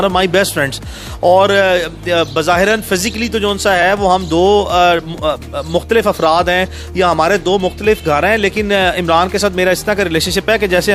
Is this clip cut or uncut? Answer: uncut